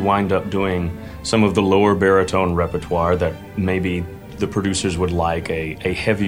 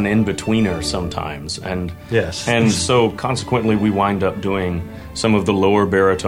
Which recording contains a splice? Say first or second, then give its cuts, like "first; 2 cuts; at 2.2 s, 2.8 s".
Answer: first; 2 cuts; at 3.4 s, 4.3 s